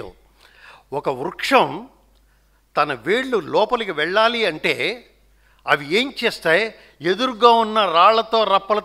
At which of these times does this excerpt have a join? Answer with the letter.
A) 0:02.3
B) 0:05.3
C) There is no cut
C